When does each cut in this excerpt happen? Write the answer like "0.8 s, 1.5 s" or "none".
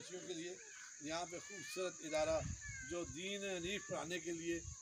none